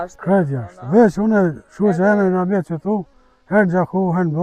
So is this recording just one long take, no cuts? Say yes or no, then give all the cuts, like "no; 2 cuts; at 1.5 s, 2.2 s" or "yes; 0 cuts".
yes; 0 cuts